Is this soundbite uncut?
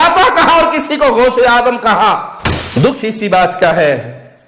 no; 1 cut; at 2.3 s

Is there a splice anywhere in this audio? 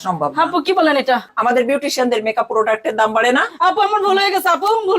yes; 1 cut; at 1.3 s

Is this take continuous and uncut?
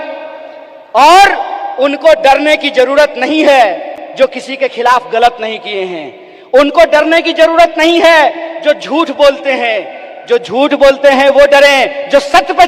yes; 0 cuts

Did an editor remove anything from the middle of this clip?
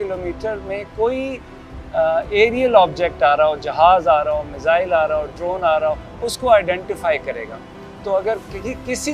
no; 0 cuts

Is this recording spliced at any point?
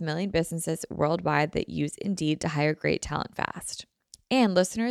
no; 0 cuts

